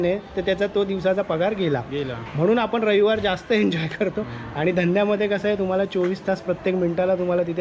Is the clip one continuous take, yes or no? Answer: yes